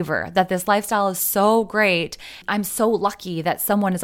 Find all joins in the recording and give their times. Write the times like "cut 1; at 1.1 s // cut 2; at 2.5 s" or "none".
none